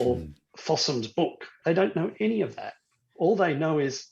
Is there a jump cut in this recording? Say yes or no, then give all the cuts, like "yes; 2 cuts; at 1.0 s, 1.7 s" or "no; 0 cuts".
yes; 1 cut; at 1.5 s